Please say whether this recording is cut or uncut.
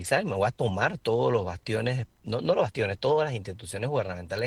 uncut